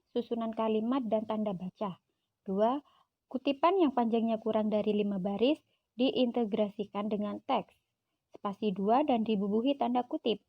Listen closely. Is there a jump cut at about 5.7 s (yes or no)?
no